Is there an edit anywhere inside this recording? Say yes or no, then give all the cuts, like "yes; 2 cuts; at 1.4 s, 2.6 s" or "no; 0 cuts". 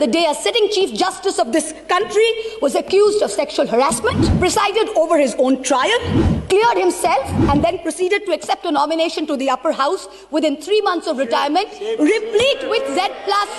yes; 1 cut; at 4.3 s